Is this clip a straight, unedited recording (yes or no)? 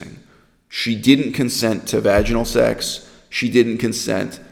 yes